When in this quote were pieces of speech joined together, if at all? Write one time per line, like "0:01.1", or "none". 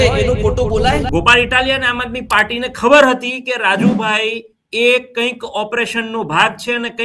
0:01.1